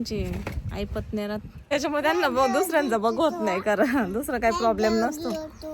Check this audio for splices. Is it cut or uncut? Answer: cut